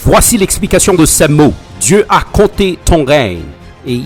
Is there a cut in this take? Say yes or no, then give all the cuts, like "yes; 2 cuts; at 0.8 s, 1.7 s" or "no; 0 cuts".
no; 0 cuts